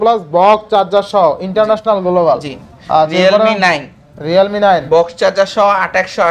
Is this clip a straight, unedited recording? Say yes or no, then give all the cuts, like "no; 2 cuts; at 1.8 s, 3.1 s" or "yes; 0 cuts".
yes; 0 cuts